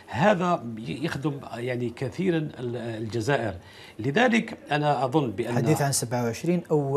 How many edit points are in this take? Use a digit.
0